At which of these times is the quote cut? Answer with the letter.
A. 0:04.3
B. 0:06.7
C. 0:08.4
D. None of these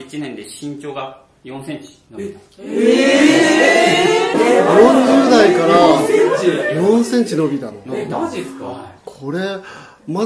A